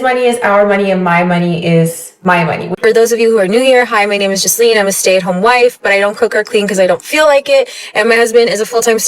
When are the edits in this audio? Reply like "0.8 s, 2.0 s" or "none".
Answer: 2.7 s